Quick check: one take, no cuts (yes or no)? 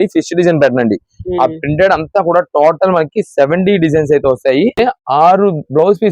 no